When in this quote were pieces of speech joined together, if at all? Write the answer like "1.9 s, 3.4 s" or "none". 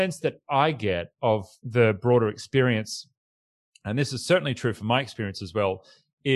1.6 s